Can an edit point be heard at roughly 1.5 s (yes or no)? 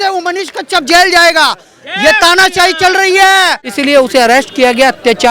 no